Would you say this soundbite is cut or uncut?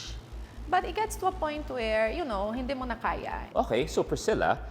cut